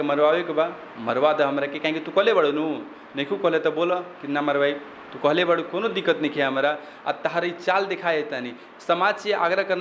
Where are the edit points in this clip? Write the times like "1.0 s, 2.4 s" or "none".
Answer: none